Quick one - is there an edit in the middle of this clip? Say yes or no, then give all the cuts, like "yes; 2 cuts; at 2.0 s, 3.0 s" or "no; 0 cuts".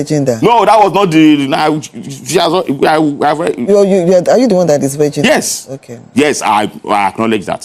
no; 0 cuts